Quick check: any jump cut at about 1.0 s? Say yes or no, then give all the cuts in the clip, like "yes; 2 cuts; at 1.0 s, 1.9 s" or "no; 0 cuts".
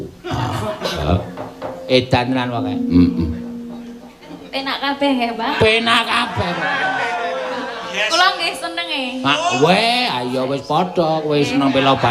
yes; 1 cut; at 1.0 s